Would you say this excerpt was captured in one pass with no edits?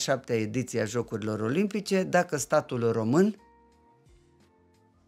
yes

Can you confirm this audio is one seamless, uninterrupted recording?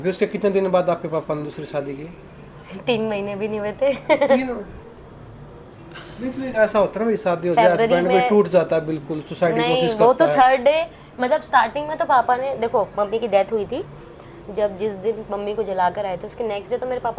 yes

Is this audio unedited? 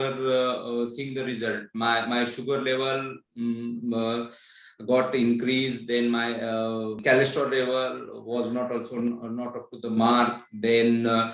no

